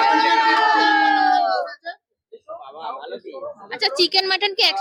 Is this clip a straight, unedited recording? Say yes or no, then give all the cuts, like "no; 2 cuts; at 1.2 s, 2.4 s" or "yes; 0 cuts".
yes; 0 cuts